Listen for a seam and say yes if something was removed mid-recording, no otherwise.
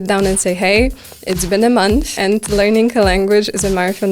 yes